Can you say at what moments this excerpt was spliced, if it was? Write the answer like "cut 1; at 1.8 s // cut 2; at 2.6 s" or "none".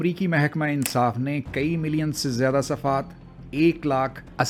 none